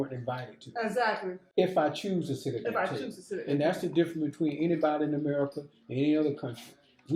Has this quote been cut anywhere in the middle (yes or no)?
no